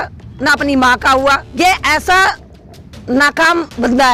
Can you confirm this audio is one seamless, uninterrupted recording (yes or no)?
no